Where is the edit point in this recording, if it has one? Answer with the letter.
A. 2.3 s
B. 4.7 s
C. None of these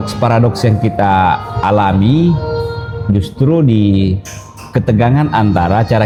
C